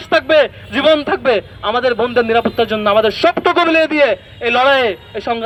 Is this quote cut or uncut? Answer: uncut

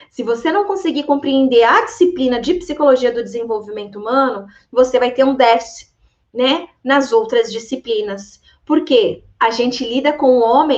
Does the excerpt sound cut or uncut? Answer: uncut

